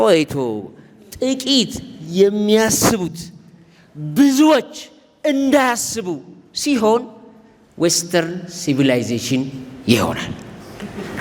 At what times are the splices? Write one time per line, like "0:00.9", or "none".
none

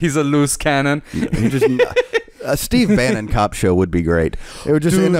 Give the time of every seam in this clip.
none

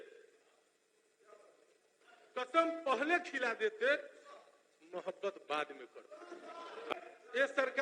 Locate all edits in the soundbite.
0:06.9

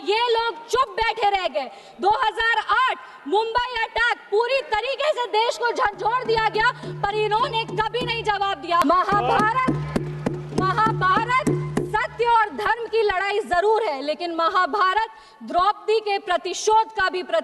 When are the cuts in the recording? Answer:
0:08.8

